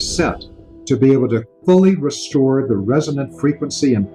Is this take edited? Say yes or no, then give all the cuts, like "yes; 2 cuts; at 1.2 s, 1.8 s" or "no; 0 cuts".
no; 0 cuts